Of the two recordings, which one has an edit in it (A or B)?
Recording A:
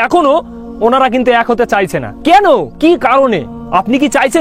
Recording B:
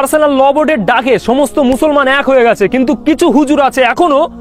A